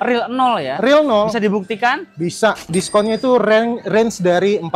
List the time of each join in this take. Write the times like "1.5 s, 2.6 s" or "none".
2.6 s